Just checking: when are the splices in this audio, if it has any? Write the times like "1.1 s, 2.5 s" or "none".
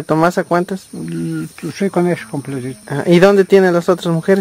2.7 s